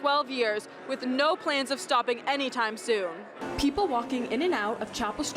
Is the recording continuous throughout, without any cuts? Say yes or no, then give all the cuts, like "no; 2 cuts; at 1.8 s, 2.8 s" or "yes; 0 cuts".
no; 1 cut; at 3.4 s